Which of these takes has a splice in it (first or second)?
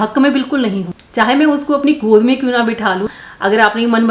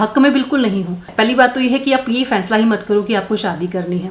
first